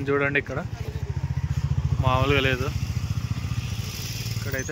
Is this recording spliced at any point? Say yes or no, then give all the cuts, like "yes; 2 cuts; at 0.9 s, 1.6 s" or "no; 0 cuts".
no; 0 cuts